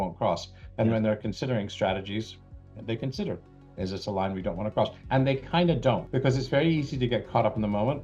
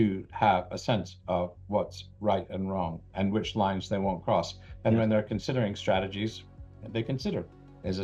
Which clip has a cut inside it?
first; 2 cuts; at 5.0 s, 6.1 s

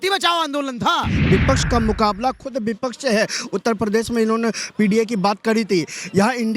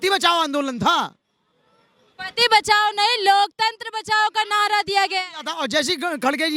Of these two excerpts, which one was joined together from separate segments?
first; 1 cut; at 1.2 s

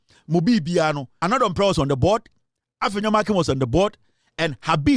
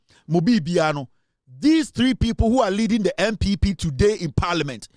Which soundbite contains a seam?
first; 1 cut; at 1.1 s

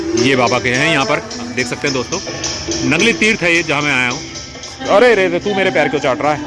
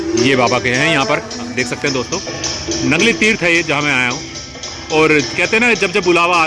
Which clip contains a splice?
first; 1 cut; at 4.7 s

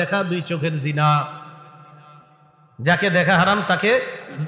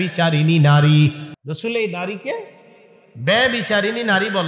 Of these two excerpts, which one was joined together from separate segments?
second; 1 cut; at 1.3 s

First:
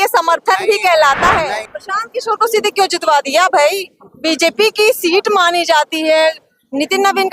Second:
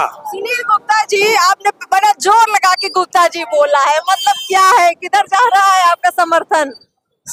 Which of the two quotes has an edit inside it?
first; 1 cut; at 1.7 s

